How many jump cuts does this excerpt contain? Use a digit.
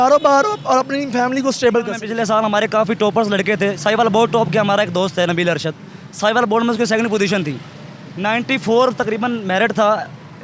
1